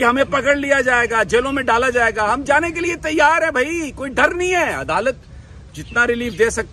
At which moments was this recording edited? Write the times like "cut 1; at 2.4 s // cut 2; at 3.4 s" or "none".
none